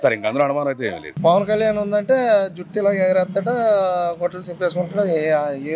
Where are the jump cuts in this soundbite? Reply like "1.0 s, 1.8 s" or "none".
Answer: 1.1 s